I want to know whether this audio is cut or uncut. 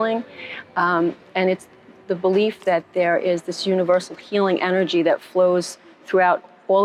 uncut